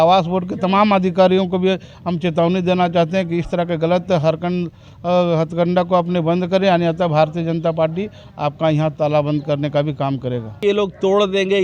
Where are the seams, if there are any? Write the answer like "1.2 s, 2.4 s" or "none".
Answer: 10.6 s

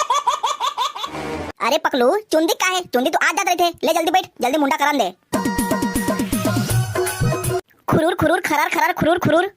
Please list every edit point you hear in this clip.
1.0 s, 7.5 s

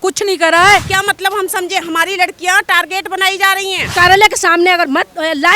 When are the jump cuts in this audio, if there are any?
0.9 s, 3.9 s

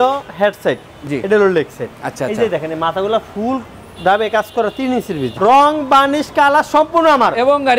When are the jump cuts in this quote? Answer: 5.4 s

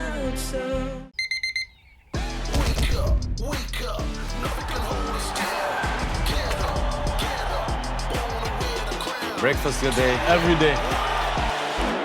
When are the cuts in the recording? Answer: 1.0 s

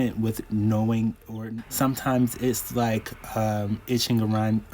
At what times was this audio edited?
1.3 s

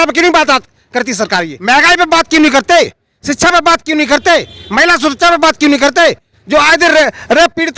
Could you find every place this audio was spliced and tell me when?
1.5 s

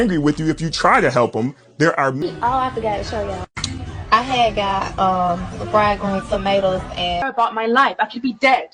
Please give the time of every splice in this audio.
2.2 s, 7.2 s

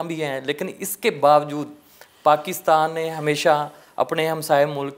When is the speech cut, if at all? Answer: none

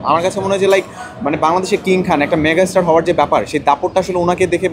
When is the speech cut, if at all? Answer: none

